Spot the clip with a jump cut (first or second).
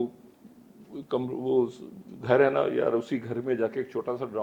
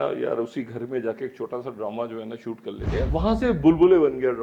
second